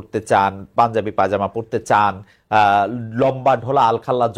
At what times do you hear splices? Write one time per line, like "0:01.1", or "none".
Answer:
none